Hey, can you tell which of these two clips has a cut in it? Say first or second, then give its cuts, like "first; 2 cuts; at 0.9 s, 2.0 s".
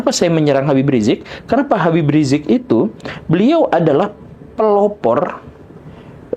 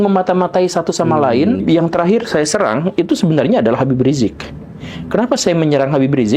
second; 1 cut; at 1.6 s